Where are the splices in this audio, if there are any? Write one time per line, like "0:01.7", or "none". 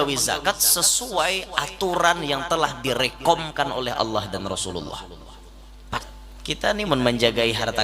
0:06.1